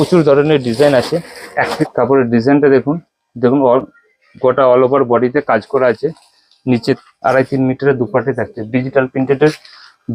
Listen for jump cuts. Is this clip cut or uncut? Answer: cut